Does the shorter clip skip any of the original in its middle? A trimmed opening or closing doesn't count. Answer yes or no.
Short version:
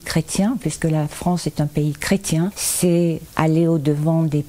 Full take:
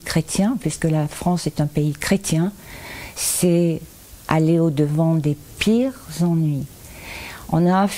yes